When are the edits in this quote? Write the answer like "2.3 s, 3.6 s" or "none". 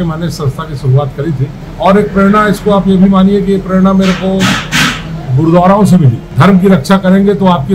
1.6 s, 6.2 s